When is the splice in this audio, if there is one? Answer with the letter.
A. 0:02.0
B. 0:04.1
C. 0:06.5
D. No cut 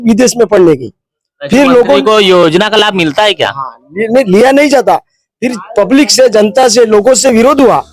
D